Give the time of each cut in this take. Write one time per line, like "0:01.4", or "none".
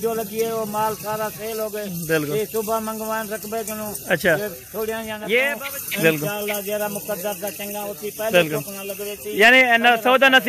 0:05.6